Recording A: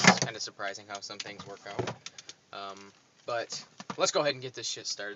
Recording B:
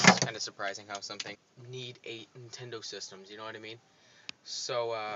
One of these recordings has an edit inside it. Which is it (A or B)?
A